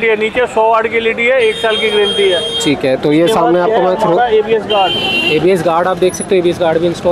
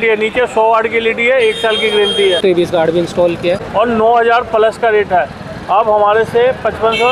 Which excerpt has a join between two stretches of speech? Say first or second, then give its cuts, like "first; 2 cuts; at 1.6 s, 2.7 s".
second; 2 cuts; at 2.4 s, 3.6 s